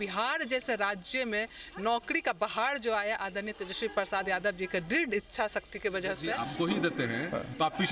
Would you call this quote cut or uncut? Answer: cut